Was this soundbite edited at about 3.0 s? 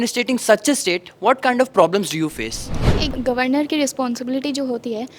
yes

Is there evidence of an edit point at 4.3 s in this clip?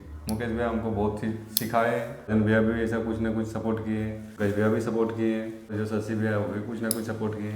yes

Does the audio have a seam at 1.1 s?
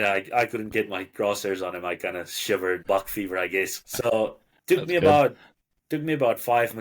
no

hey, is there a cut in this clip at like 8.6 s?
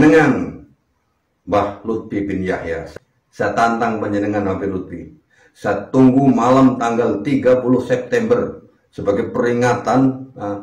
no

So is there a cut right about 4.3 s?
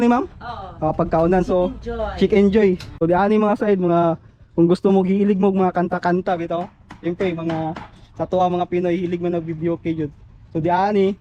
no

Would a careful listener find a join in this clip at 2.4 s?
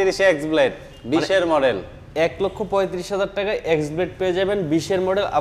no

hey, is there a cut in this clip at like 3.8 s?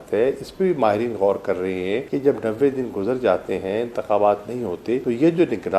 no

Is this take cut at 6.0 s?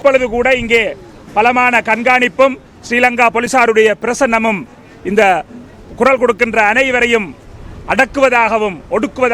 no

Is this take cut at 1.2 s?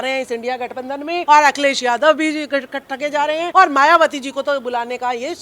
yes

